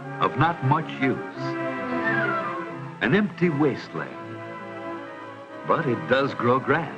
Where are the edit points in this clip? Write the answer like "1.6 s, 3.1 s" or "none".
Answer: 3.4 s